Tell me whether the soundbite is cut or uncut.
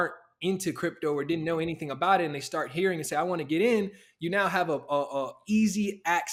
uncut